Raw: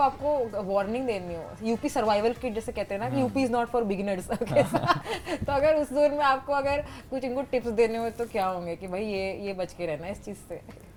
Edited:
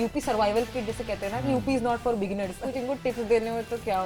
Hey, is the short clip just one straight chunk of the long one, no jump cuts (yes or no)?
no